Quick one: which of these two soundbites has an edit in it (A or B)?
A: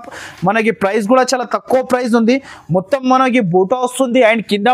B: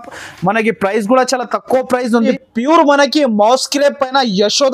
B